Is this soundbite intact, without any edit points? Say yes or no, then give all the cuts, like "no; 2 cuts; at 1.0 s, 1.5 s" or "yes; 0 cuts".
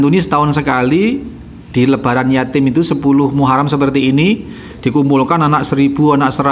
yes; 0 cuts